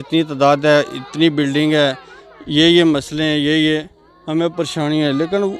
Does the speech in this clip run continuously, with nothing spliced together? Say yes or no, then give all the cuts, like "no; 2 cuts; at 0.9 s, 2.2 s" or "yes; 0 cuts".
yes; 0 cuts